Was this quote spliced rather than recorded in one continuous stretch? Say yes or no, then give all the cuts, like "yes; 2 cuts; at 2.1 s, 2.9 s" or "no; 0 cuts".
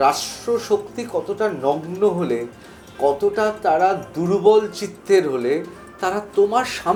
no; 0 cuts